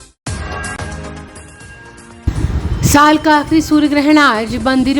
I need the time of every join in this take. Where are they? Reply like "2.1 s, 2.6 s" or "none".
1.6 s